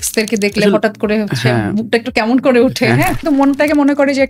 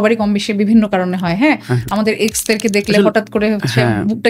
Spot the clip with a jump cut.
first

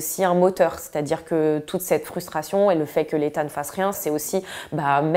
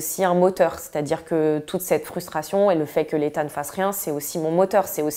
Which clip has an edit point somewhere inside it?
first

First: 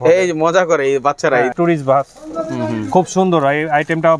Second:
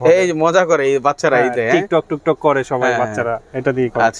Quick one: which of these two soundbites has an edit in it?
first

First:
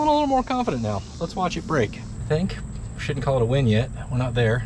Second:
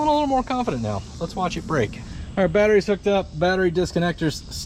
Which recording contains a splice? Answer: first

